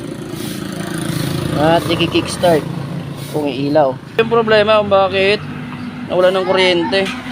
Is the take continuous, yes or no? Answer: no